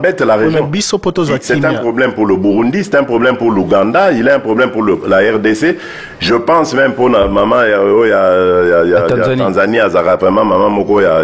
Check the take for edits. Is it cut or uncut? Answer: uncut